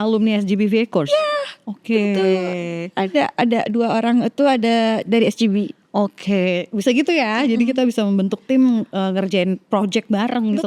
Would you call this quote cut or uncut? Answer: uncut